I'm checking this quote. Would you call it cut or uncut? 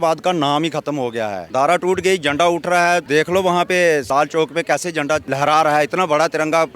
cut